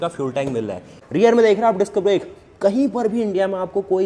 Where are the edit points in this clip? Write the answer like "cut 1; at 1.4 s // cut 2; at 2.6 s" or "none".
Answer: cut 1; at 1.0 s